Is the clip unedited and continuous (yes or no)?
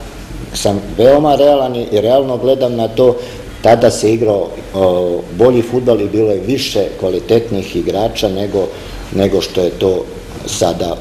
yes